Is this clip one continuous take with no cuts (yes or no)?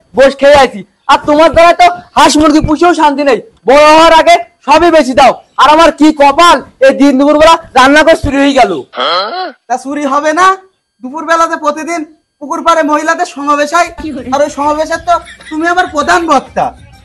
yes